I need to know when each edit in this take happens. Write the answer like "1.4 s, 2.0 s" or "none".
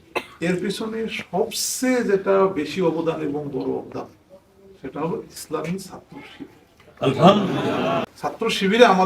8.0 s